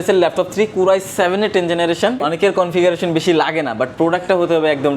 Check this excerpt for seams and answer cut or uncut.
cut